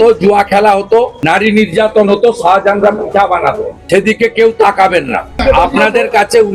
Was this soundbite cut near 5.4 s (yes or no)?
yes